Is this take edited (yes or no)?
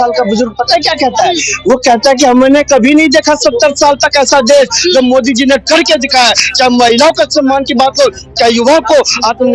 no